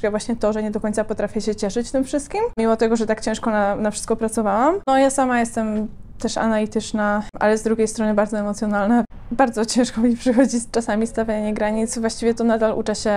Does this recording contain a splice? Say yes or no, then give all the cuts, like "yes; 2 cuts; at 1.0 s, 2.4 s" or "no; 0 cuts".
yes; 4 cuts; at 2.6 s, 4.8 s, 7.3 s, 9.1 s